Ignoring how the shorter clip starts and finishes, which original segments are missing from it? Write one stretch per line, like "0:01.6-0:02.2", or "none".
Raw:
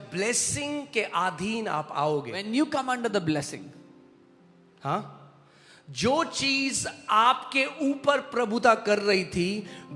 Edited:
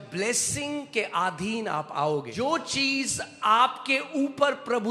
0:02.3-0:05.9

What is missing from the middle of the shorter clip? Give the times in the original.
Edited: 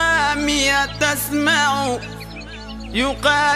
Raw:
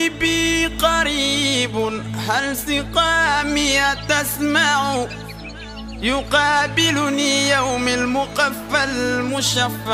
none

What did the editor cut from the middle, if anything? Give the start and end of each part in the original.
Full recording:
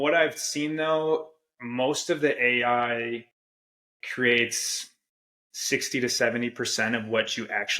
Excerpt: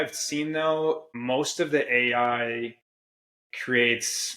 0:01.3-0:01.6

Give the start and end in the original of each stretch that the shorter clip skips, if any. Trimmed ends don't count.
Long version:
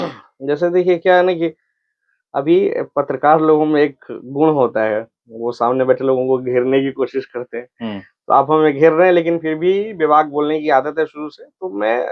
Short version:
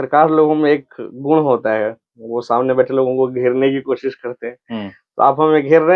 none

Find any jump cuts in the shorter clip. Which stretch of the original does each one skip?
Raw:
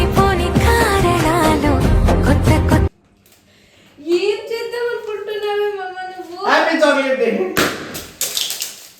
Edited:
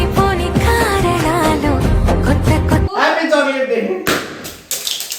0:02.9-0:06.4

